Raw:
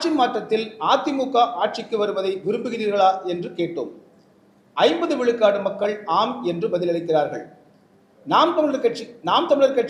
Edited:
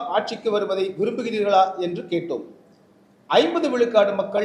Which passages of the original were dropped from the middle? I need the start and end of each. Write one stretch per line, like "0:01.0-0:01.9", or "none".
none